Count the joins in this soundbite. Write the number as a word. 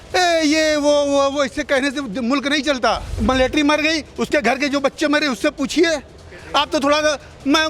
one